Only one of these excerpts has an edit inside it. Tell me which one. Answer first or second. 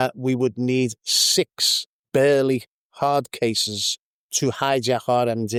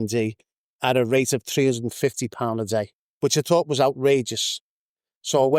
second